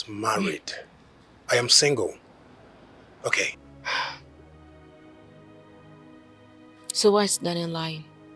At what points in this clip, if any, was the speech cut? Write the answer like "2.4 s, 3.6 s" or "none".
3.7 s